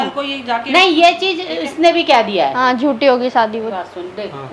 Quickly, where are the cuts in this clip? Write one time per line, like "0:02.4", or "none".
0:03.5